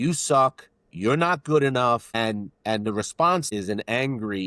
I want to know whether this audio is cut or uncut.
cut